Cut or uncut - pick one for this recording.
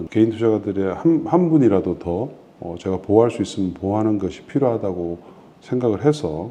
uncut